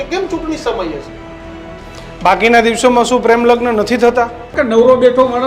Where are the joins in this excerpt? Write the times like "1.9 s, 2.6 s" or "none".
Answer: 4.5 s